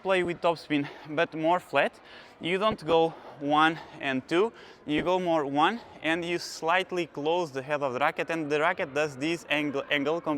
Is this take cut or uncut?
uncut